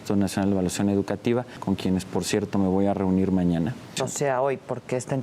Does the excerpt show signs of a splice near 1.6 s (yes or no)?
yes